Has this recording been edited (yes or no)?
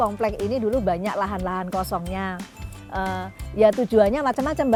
no